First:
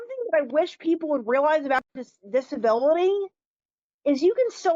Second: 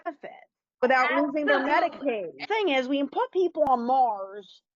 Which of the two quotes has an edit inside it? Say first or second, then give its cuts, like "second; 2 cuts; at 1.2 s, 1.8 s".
second; 1 cut; at 2.4 s